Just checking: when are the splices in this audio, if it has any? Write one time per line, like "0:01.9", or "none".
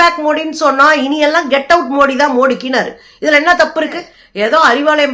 0:04.2